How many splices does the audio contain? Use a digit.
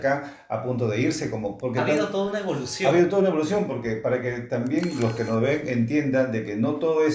0